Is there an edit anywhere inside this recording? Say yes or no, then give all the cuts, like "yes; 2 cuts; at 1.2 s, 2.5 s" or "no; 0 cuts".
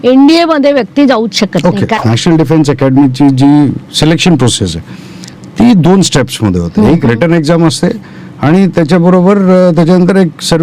yes; 1 cut; at 1.9 s